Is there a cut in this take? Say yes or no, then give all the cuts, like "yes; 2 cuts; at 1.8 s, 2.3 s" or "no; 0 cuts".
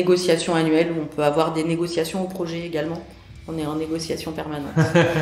no; 0 cuts